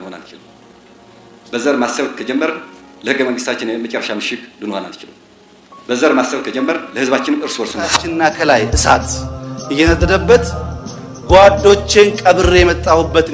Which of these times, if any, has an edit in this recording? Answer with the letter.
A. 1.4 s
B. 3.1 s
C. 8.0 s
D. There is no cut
C